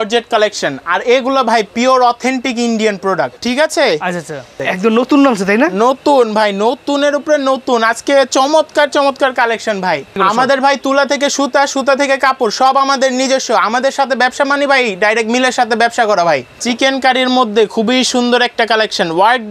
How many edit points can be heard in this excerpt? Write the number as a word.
four